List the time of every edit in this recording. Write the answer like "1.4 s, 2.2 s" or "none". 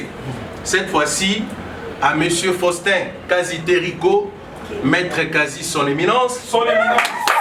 none